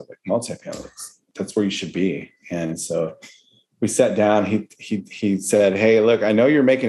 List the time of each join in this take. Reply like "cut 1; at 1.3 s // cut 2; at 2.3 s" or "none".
cut 1; at 1.2 s